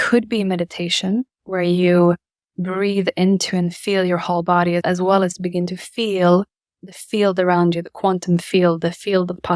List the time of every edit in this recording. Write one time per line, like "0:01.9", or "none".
0:01.4
0:04.8
0:06.8